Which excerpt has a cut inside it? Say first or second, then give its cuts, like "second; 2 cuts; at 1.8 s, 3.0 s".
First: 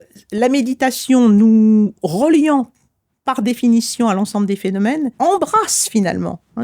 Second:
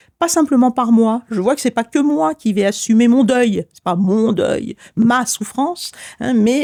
first; 1 cut; at 5.1 s